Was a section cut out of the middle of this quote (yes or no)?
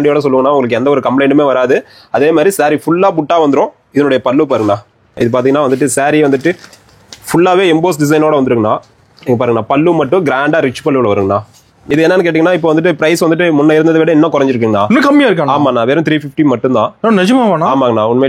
yes